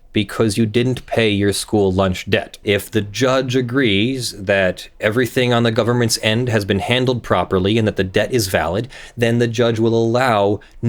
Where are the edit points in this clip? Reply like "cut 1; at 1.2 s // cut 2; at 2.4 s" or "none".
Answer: cut 1; at 2.5 s